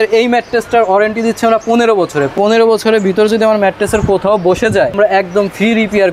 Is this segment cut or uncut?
cut